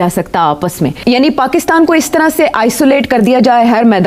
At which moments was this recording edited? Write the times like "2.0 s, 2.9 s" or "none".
1.0 s